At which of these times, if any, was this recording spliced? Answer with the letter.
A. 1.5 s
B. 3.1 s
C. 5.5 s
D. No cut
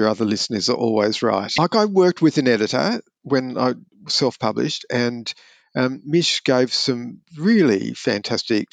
A